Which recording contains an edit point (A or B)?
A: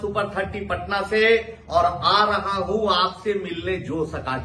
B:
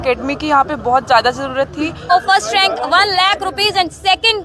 B